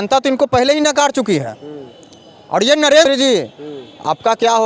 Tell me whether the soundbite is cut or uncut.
cut